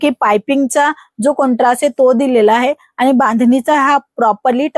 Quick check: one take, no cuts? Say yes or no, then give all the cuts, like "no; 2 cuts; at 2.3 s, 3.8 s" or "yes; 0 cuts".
yes; 0 cuts